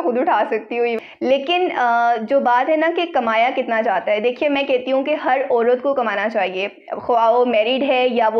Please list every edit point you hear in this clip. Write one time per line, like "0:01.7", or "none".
none